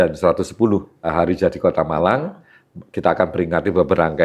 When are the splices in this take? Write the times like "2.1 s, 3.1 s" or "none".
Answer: 1.1 s